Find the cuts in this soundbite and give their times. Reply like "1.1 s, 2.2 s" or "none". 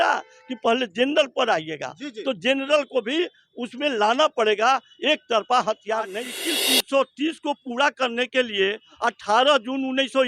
6.2 s

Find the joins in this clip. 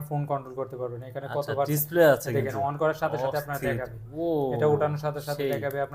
none

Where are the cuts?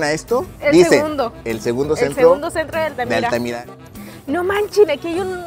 3.5 s

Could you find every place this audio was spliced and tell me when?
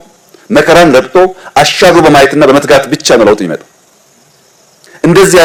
none

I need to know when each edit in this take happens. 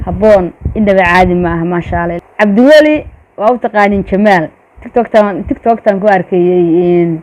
2.1 s

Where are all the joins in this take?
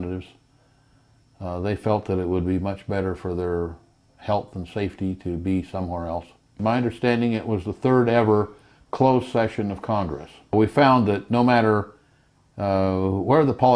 6.6 s, 10.5 s

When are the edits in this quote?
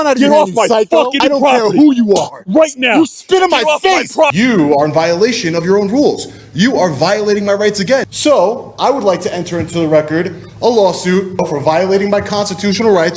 1.2 s, 4.3 s, 8.1 s, 11.4 s

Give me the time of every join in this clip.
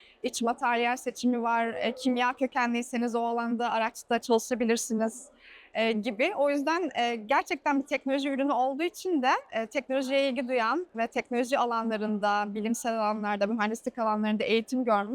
none

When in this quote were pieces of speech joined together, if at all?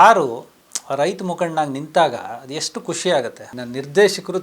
3.5 s

